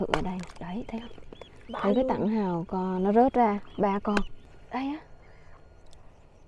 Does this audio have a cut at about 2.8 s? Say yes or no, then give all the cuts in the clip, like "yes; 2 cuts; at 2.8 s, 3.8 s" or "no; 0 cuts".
no; 1 cut; at 4.4 s